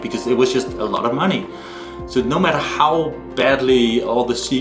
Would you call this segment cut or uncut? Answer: uncut